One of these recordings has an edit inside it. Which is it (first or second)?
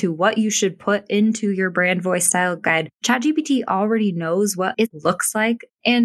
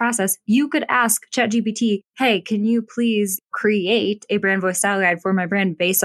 first